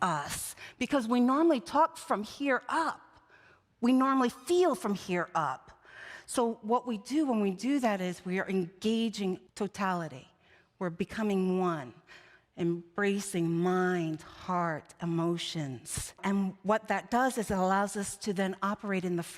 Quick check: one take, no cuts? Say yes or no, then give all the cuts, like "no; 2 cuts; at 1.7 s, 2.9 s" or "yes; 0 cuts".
no; 2 cuts; at 9.5 s, 16.2 s